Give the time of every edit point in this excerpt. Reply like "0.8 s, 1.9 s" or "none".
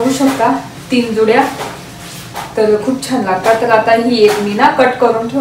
none